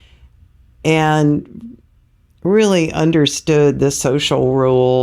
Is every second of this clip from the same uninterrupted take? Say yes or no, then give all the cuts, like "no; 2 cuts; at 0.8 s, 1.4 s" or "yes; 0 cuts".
yes; 0 cuts